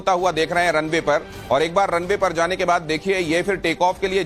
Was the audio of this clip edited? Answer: no; 0 cuts

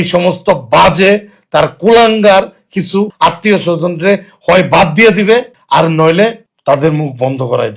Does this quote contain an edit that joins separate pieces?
yes; 3 cuts; at 3.1 s, 5.6 s, 6.5 s

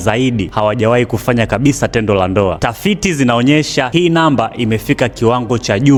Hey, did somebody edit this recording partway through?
no; 0 cuts

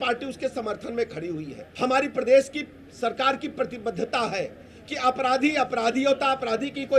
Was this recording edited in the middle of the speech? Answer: yes; 1 cut; at 1.6 s

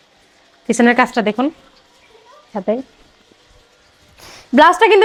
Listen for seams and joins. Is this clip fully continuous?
yes; 0 cuts

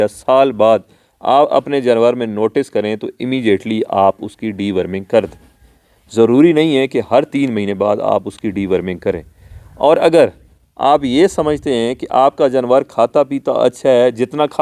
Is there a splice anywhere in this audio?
no; 0 cuts

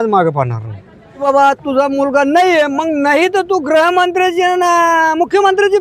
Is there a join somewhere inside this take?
yes; 1 cut; at 1.2 s

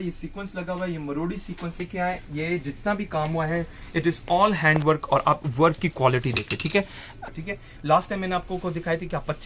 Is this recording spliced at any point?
yes; 2 cuts; at 1.8 s, 7.1 s

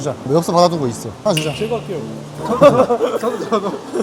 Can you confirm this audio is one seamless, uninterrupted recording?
yes; 0 cuts

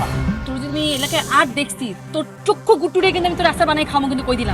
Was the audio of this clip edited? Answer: no; 0 cuts

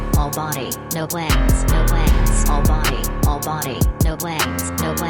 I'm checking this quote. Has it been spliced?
no; 0 cuts

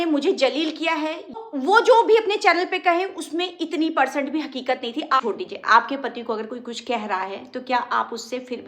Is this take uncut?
no; 2 cuts; at 1.3 s, 5.2 s

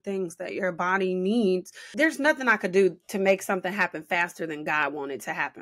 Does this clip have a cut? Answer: yes; 1 cut; at 1.9 s

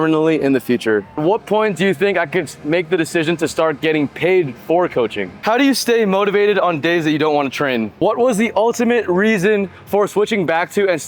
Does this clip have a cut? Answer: yes; 3 cuts; at 1.2 s, 5.3 s, 7.9 s

